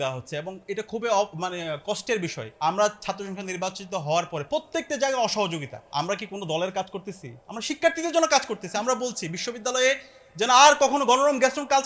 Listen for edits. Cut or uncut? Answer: uncut